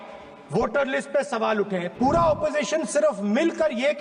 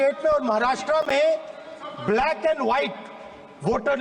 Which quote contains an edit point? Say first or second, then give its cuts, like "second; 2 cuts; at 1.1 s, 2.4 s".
first; 1 cut; at 1.9 s